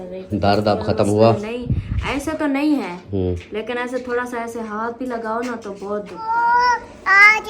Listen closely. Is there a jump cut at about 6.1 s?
yes; 1 cut; at 6.1 s

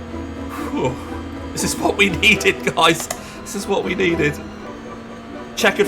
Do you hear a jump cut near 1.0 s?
no; 1 cut; at 4.7 s

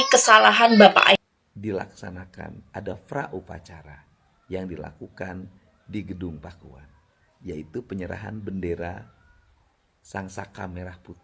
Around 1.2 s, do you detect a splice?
yes; 1 cut; at 1.2 s

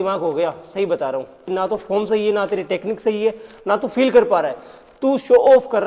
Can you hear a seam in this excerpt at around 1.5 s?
yes; 1 cut; at 1.5 s

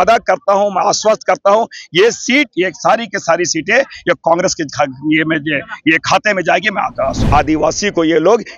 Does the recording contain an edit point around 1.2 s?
no; 1 cut; at 7.2 s

